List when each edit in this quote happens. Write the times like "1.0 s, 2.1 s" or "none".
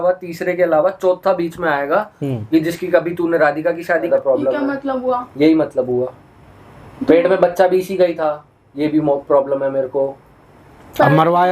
4.1 s